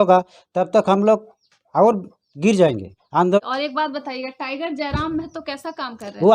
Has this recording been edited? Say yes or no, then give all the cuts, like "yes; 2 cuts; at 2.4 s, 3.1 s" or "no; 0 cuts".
yes; 1 cut; at 3.4 s